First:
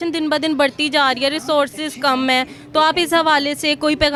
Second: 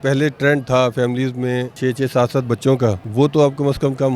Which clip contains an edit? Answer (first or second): second